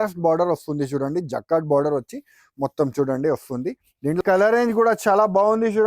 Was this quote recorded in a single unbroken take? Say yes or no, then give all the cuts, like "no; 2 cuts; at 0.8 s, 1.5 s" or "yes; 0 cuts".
no; 1 cut; at 4.2 s